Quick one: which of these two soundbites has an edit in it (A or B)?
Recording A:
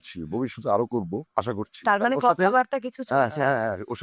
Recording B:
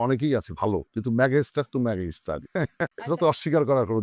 B